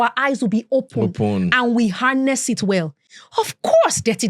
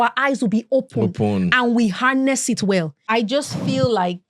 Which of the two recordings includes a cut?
second; 1 cut; at 3.0 s

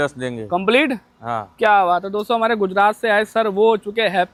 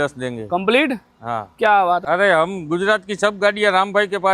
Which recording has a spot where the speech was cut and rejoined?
second; 1 cut; at 2.0 s

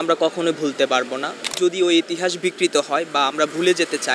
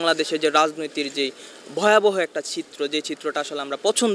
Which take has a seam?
first; 1 cut; at 1.5 s

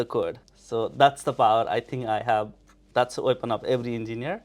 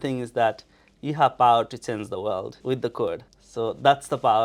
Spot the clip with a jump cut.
first; 1 cut; at 2.8 s

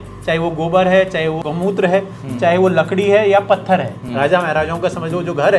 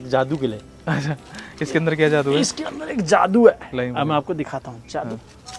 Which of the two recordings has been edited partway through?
first; 2 cuts; at 1.4 s, 4.0 s

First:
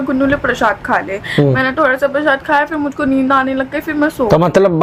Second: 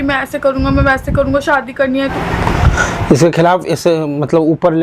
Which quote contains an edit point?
second; 1 cut; at 2.1 s

